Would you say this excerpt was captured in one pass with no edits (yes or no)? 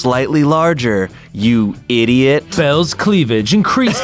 no